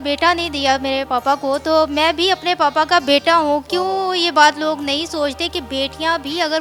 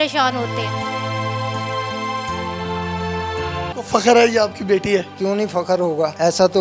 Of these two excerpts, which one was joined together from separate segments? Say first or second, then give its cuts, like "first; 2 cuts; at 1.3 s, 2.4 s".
second; 1 cut; at 3.7 s